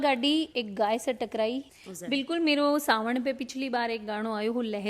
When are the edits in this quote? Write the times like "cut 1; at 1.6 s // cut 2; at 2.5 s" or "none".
cut 1; at 1.7 s